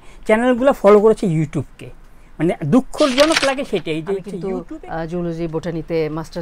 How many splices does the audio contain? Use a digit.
1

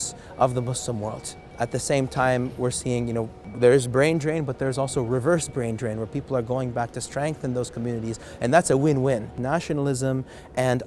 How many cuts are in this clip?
2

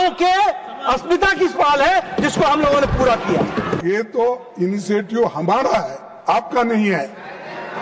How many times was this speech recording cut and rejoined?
1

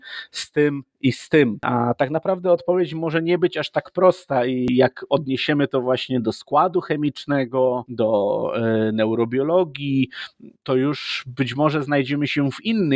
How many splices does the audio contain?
3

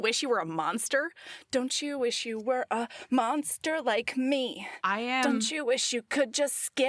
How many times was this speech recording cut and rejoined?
0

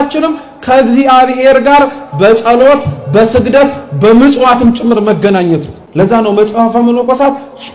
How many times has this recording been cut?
1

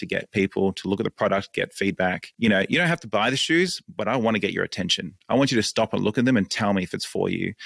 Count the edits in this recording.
1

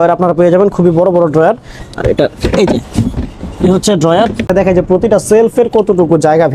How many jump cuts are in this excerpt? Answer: 1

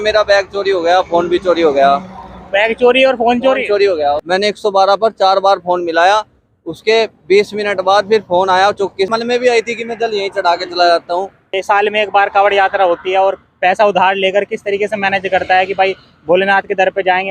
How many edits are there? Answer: 3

